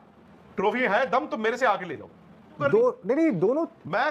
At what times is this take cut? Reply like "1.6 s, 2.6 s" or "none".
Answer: 2.5 s